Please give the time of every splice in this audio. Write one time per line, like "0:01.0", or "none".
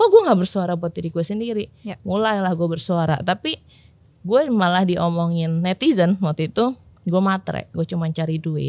none